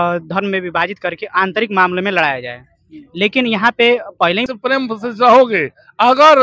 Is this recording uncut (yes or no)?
no